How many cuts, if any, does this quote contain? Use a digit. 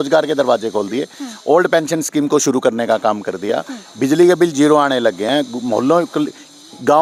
0